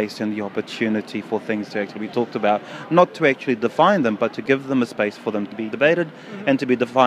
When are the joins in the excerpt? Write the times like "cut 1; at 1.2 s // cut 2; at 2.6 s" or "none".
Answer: cut 1; at 5.5 s